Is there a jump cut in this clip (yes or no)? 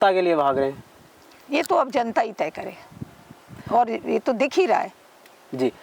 no